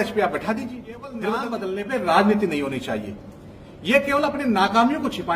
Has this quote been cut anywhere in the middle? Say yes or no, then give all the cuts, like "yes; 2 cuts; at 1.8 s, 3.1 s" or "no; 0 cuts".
yes; 1 cut; at 1.4 s